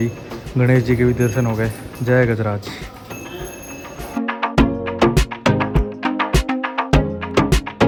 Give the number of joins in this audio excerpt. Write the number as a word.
zero